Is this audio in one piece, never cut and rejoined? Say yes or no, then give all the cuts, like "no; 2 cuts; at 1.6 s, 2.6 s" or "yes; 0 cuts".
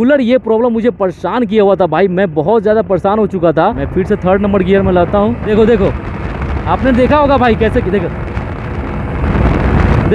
no; 2 cuts; at 3.8 s, 5.4 s